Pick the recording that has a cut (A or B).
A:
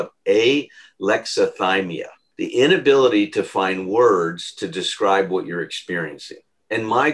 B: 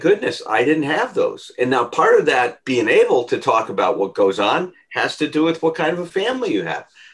A